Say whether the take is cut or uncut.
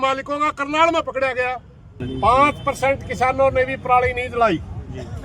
cut